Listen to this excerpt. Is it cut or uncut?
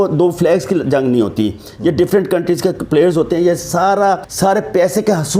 cut